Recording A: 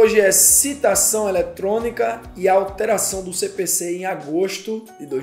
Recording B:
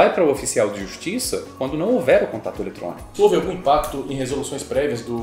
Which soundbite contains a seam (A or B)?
B